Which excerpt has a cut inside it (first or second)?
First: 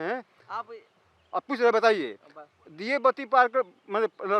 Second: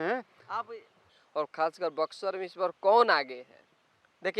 second